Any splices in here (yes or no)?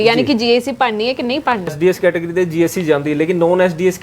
yes